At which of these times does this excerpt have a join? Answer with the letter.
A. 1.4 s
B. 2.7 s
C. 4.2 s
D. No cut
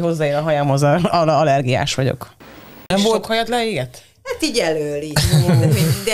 B